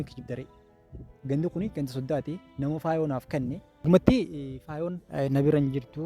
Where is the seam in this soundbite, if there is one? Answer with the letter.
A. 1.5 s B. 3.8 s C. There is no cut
B